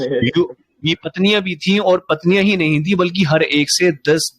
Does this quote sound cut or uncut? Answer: uncut